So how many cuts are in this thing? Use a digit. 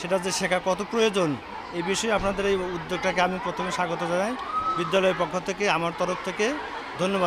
0